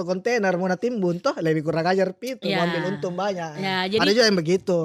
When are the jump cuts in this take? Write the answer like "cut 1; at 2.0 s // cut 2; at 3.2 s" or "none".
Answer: none

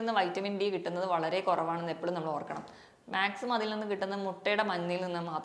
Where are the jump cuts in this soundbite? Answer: none

